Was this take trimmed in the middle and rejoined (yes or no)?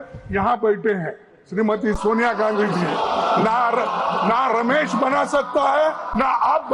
no